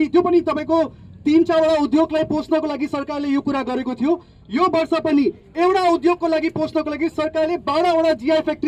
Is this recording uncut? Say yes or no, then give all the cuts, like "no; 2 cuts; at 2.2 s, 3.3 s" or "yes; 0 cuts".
yes; 0 cuts